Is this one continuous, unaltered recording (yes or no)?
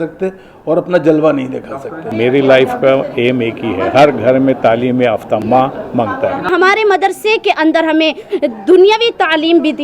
no